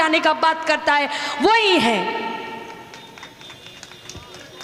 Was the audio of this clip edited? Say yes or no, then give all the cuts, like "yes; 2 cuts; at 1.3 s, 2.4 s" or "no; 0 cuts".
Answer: no; 0 cuts